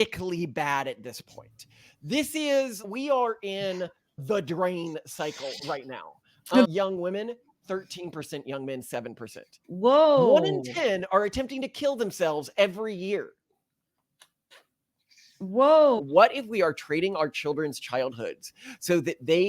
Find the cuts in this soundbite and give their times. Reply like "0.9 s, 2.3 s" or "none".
6.7 s, 16.0 s